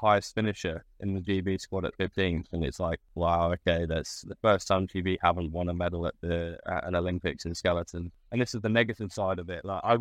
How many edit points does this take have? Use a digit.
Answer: 2